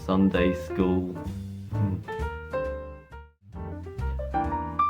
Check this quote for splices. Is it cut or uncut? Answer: cut